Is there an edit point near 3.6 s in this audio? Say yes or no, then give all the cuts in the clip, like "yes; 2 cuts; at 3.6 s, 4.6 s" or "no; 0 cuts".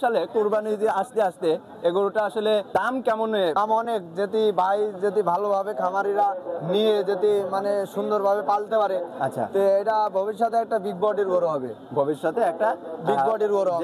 yes; 2 cuts; at 2.7 s, 3.6 s